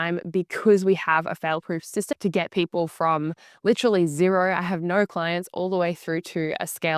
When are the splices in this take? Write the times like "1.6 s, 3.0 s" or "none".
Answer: 2.1 s